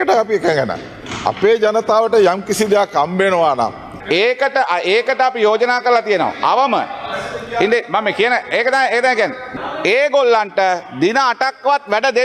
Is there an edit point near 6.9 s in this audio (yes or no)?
no